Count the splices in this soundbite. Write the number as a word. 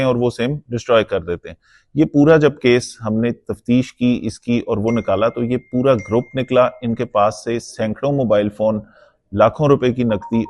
zero